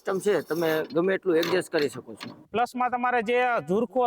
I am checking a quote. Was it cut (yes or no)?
yes